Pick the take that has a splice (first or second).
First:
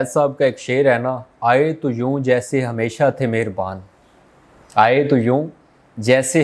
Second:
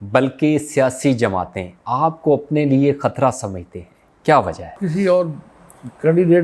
second